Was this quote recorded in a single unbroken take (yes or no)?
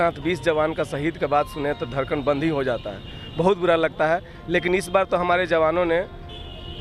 yes